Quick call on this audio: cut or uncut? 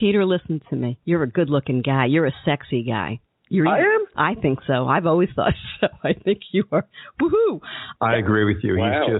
cut